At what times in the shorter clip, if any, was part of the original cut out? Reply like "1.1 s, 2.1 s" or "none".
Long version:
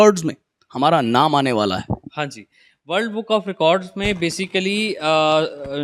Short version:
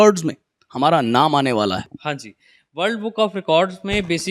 1.9 s